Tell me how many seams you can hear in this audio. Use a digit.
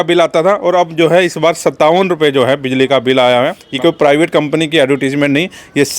1